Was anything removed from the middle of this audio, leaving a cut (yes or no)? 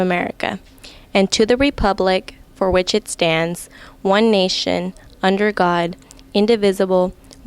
yes